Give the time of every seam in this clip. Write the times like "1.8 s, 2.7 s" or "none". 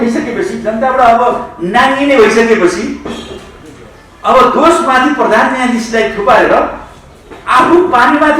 none